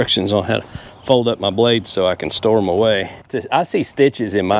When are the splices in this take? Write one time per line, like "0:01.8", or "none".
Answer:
0:03.2